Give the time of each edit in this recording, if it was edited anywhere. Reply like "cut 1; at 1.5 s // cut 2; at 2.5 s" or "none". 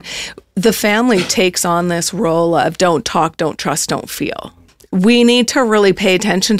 cut 1; at 4.4 s